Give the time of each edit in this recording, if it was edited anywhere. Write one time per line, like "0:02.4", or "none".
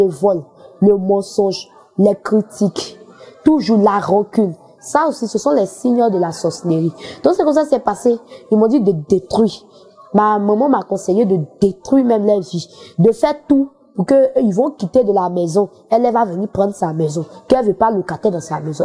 none